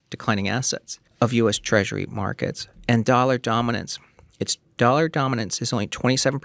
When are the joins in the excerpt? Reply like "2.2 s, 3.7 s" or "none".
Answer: 1.0 s